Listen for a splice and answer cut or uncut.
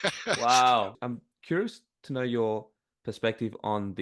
cut